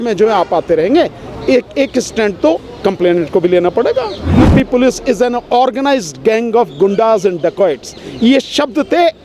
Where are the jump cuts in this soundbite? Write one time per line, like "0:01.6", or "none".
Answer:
0:04.4